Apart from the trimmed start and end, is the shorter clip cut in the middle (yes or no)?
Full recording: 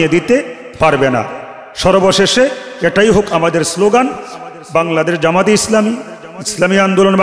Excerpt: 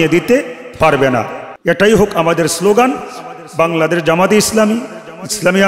yes